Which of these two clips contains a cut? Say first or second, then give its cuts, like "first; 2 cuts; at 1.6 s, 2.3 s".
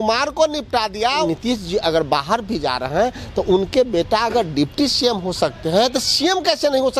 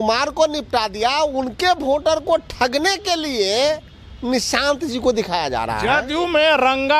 first; 1 cut; at 1.2 s